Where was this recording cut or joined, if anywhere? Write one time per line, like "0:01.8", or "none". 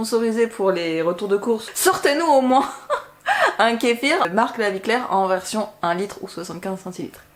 0:01.7
0:04.3